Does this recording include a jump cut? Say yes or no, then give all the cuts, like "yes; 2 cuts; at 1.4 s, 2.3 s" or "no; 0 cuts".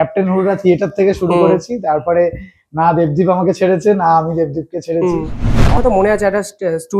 yes; 1 cut; at 5.8 s